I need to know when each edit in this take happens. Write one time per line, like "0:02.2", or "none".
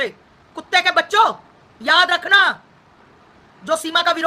none